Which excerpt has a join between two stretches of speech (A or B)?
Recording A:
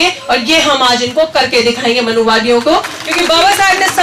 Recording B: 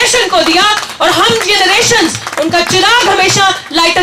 A